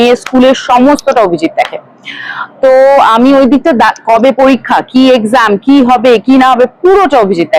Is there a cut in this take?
no; 0 cuts

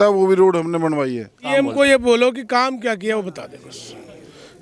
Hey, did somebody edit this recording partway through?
yes; 1 cut; at 1.4 s

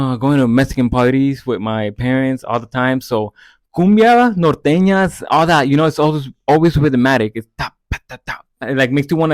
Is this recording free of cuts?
yes; 0 cuts

